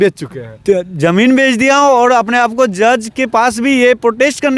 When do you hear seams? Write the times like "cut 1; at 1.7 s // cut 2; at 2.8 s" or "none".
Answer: none

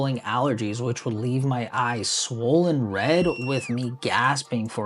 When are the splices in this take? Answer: none

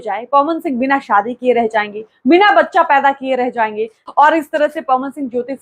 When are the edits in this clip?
cut 1; at 4.0 s

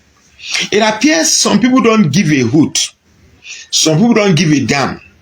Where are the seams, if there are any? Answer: none

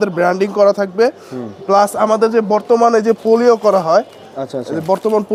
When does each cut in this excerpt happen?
none

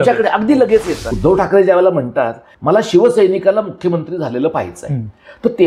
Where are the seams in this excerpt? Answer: cut 1; at 1.0 s // cut 2; at 2.5 s

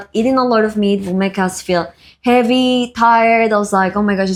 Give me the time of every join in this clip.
none

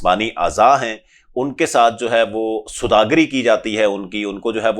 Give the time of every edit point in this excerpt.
none

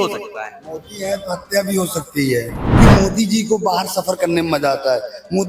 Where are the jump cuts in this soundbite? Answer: cut 1; at 2.8 s

